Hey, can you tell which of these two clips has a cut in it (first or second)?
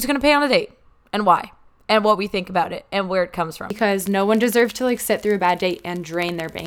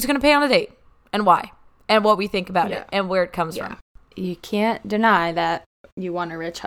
first